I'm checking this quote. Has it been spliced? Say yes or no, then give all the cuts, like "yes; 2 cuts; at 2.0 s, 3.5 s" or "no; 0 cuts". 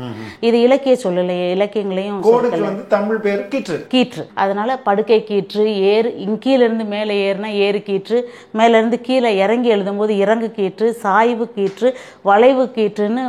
yes; 1 cut; at 4.2 s